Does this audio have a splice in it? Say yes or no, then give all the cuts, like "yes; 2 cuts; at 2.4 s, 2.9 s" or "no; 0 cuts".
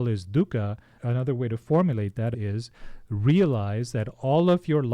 yes; 2 cuts; at 0.9 s, 2.3 s